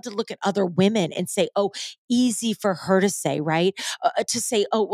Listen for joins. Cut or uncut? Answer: uncut